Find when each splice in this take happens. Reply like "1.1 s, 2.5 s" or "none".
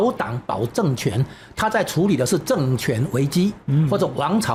none